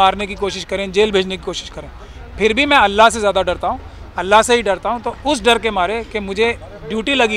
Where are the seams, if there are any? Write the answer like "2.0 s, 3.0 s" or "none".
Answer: none